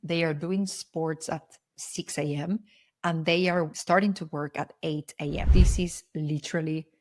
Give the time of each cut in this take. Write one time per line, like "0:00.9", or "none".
0:03.8
0:05.5